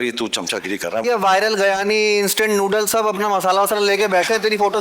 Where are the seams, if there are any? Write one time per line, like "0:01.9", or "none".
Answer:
0:01.0